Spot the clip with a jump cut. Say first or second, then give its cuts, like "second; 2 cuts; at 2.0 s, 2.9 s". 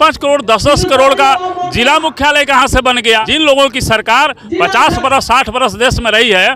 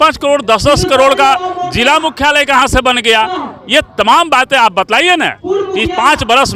first; 1 cut; at 3.3 s